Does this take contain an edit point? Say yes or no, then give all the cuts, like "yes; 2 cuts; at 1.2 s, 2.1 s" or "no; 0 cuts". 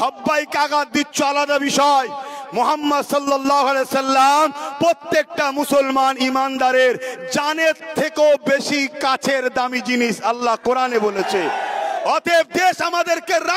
no; 0 cuts